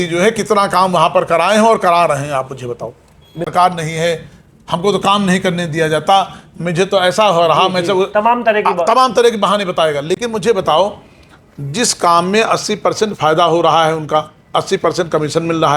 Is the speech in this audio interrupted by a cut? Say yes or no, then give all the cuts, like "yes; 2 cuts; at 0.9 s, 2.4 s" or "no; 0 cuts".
yes; 1 cut; at 3.5 s